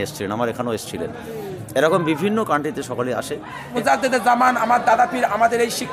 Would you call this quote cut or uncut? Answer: cut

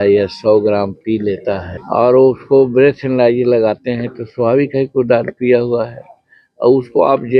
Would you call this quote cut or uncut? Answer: cut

